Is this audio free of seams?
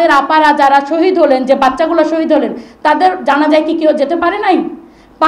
yes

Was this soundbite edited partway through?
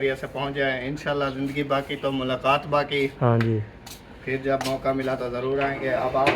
no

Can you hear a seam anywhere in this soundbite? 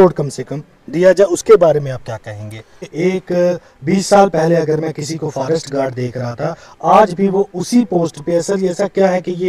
yes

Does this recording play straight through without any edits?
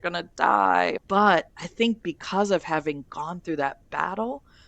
no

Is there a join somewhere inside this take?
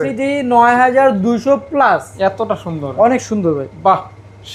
yes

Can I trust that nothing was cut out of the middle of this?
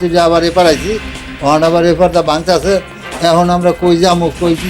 yes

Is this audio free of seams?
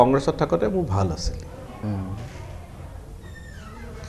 yes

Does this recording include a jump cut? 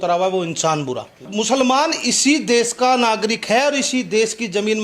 yes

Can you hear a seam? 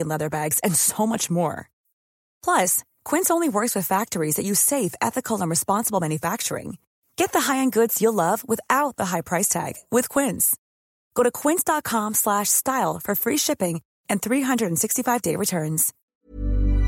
yes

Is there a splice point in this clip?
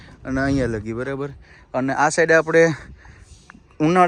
no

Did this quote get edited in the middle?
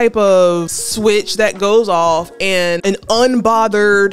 no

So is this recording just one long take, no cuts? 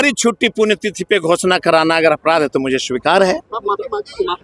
yes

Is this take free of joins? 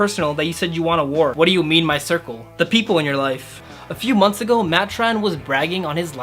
no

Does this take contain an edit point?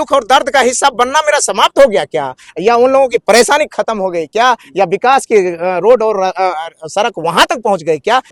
no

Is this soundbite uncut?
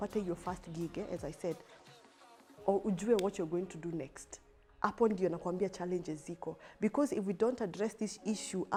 yes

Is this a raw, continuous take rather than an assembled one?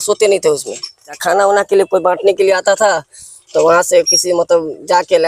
no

